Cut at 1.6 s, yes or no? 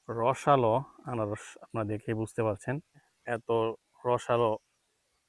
no